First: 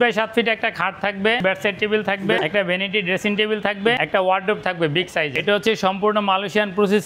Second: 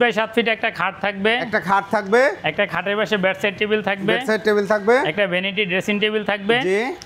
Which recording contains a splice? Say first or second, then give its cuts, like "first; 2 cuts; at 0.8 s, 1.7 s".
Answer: first; 4 cuts; at 1.4 s, 2.4 s, 4.0 s, 5.3 s